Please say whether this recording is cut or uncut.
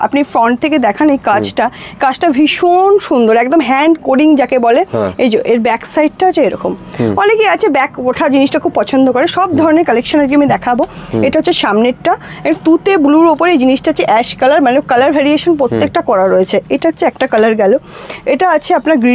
uncut